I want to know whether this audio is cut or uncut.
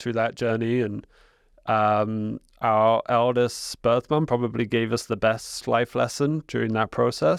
uncut